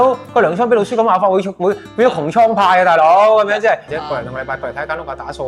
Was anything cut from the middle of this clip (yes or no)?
yes